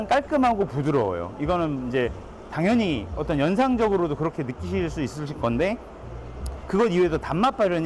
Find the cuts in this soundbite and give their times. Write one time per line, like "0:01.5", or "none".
none